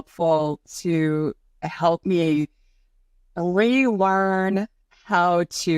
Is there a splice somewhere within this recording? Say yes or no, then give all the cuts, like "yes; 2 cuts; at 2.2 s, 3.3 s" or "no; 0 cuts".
no; 0 cuts